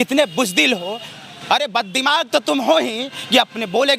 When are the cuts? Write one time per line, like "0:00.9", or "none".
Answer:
none